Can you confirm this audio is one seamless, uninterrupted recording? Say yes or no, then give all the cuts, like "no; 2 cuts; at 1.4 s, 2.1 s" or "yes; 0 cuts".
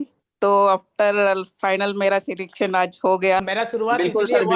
no; 1 cut; at 3.4 s